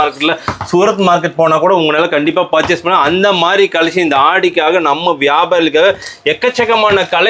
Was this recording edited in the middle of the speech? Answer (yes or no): no